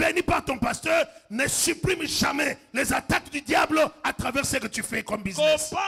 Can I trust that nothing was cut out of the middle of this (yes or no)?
yes